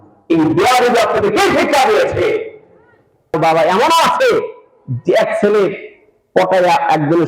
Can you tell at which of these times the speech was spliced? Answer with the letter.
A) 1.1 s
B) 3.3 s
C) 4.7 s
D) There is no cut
B